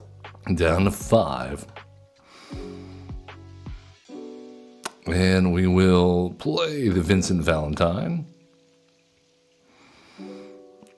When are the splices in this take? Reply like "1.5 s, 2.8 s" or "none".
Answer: none